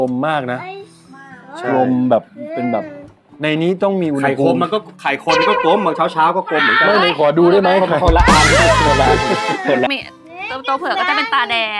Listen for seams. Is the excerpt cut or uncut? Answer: cut